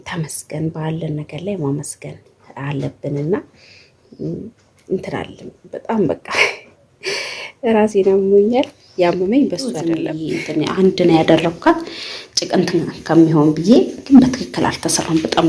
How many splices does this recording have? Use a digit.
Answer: 1